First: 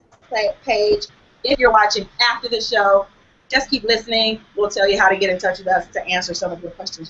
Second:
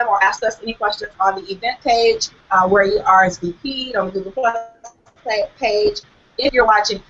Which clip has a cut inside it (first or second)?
second